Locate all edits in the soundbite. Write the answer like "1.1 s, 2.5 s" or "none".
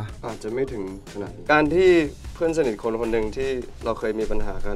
1.4 s